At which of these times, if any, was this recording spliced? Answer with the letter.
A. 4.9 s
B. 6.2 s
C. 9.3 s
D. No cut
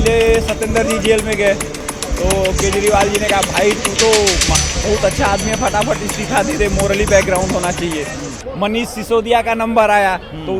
D